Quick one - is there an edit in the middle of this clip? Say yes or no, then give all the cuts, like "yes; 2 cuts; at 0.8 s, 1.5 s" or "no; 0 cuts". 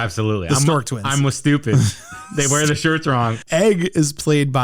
yes; 1 cut; at 3.4 s